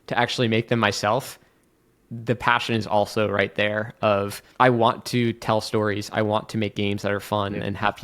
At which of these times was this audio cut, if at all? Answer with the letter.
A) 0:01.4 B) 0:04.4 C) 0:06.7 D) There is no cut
B